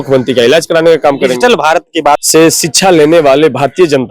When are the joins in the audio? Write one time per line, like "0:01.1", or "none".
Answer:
0:02.2